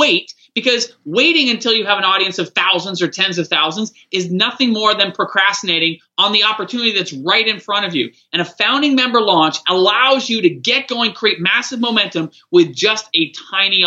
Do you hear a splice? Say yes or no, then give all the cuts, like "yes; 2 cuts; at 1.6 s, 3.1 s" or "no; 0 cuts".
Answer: no; 0 cuts